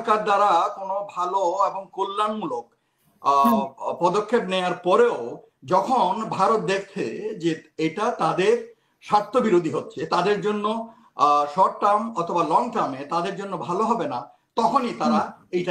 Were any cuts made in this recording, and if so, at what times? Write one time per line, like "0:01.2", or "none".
none